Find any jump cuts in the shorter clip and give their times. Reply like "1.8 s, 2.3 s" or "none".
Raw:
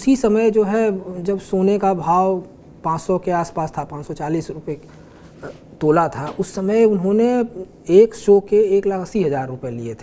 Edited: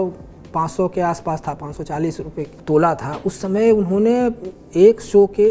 2.6 s